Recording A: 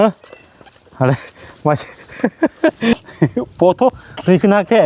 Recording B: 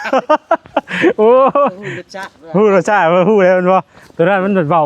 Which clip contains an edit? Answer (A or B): A